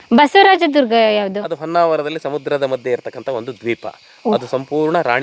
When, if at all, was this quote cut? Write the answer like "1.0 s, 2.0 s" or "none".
none